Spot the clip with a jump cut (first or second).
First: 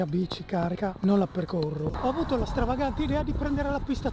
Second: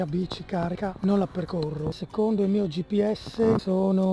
first